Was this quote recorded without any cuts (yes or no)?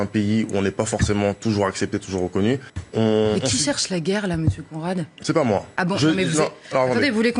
no